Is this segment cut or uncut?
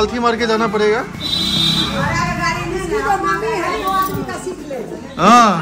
uncut